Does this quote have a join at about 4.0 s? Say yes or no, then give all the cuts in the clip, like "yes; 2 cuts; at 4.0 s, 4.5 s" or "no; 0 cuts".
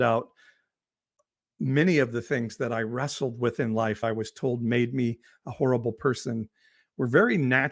yes; 1 cut; at 4.0 s